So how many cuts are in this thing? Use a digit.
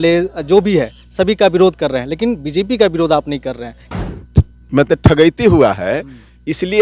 1